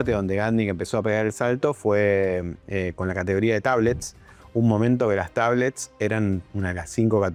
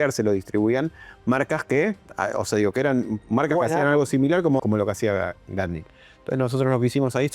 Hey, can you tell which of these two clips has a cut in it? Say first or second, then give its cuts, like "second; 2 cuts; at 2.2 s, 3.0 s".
second; 2 cuts; at 3.2 s, 4.6 s